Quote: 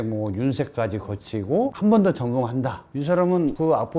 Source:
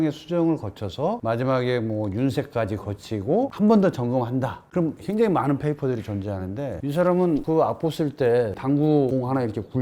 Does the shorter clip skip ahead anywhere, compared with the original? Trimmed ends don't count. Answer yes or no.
yes